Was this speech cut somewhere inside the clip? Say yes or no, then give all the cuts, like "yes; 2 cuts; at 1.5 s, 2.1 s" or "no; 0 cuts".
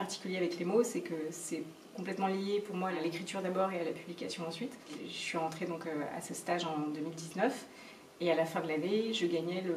yes; 2 cuts; at 3.0 s, 5.1 s